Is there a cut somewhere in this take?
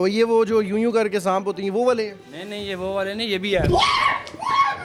no; 0 cuts

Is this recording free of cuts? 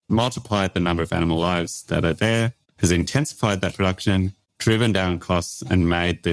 yes; 0 cuts

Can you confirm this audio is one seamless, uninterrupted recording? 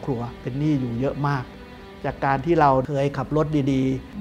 yes; 0 cuts

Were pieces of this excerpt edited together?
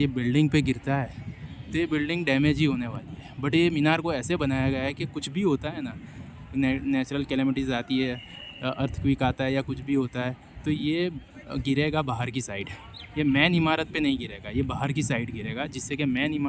no; 0 cuts

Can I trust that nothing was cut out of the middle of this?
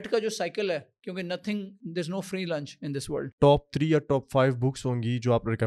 no; 2 cuts; at 1.8 s, 3.2 s

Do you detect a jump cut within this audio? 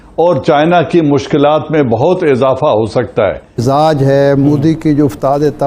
yes; 1 cut; at 3.6 s

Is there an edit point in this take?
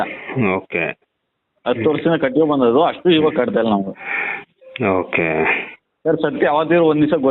no; 0 cuts

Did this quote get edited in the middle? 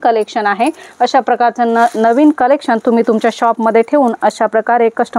no; 0 cuts

